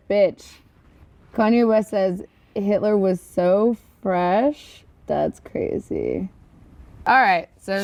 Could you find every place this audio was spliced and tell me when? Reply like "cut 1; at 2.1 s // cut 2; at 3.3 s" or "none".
none